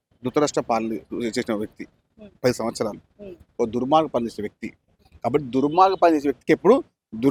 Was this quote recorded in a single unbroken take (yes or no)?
yes